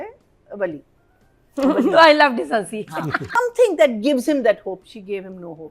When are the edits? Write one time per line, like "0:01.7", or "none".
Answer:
0:03.2